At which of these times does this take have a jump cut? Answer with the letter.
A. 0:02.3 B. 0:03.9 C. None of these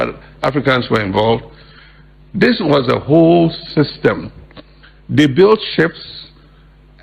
C